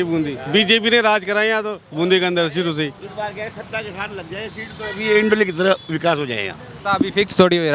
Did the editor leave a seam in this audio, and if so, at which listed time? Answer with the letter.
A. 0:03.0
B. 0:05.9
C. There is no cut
C